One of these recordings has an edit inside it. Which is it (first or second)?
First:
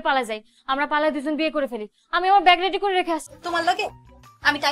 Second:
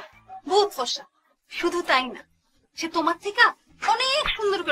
first